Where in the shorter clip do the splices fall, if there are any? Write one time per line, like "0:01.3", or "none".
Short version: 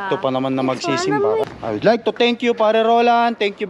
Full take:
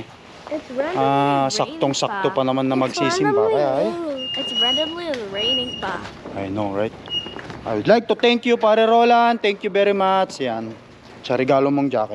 0:01.4